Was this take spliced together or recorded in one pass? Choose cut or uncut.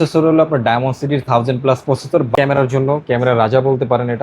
cut